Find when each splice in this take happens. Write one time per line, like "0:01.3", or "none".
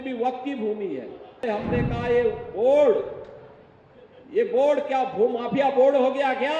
0:01.4